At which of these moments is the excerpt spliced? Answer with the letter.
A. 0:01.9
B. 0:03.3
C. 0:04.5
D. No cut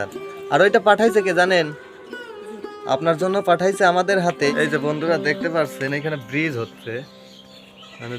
C